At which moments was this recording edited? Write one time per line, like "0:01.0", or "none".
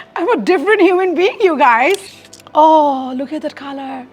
0:02.0

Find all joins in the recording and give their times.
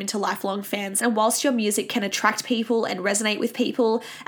0:01.0

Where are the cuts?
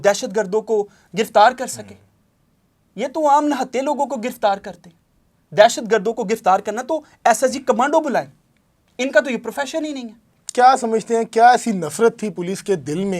none

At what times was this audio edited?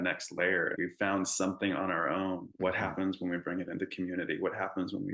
0:00.7
0:02.5

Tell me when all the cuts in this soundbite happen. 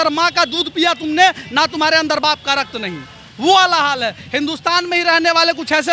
none

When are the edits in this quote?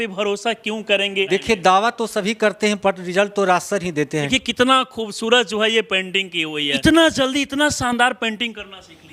0:01.3
0:04.3
0:06.8

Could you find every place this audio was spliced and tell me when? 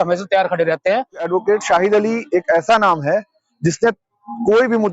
0:01.3

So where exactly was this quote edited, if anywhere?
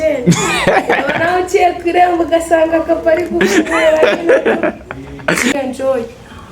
0:05.5

